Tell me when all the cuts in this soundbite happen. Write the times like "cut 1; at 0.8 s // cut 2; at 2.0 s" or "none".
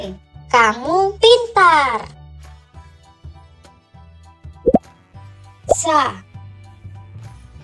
cut 1; at 6.7 s